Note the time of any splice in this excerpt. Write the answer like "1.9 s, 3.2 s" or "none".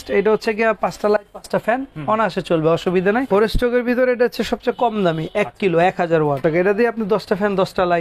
3.3 s, 6.4 s